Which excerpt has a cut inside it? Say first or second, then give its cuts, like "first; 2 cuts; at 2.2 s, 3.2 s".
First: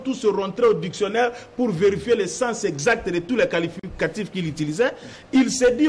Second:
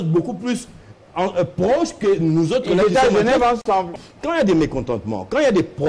second; 1 cut; at 3.9 s